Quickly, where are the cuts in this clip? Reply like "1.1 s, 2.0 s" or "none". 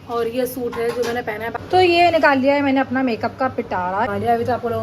1.5 s, 4.1 s